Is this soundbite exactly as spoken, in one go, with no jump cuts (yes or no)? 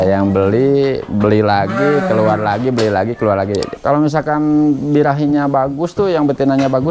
no